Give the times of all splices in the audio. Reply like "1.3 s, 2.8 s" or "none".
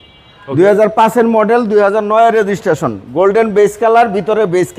none

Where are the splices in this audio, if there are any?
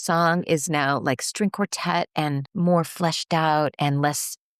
2.4 s

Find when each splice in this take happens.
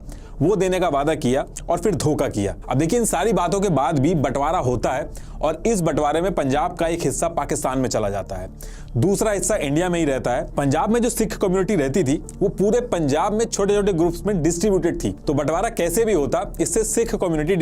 none

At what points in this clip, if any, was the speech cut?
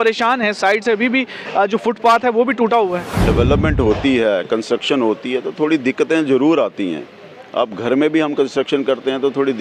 3.1 s

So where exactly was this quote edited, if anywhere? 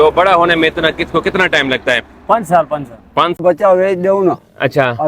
3.4 s

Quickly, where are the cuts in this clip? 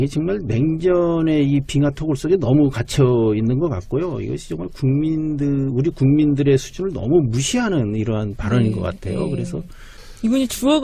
1.7 s

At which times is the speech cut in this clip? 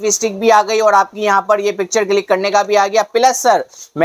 none

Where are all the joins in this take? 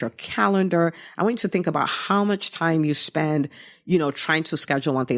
none

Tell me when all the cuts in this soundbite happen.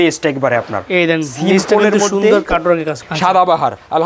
3.0 s

